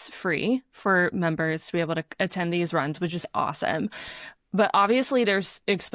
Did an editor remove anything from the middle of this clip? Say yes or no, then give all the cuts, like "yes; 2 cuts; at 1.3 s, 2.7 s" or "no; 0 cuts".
no; 0 cuts